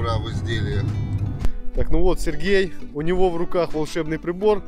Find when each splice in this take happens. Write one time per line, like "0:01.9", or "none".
0:01.4